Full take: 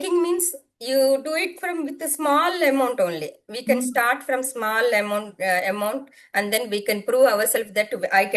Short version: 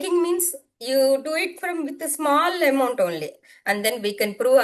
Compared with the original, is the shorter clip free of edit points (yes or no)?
no